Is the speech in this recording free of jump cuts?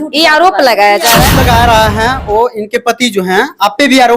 no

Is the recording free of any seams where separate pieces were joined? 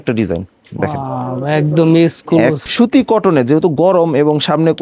no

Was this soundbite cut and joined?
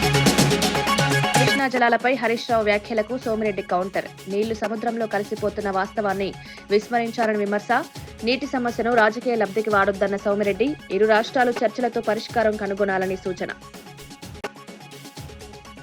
no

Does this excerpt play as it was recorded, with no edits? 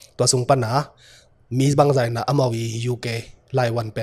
yes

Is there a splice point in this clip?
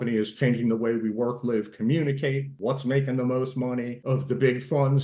yes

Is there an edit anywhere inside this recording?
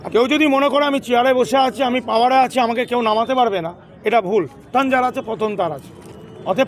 yes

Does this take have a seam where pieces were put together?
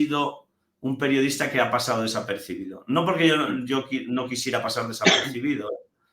no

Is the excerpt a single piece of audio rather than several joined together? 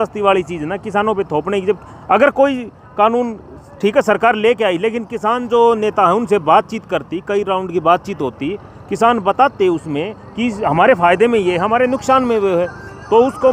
yes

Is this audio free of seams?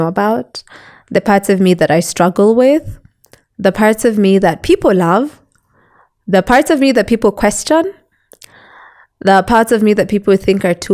yes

